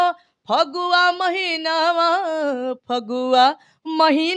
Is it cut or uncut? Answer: uncut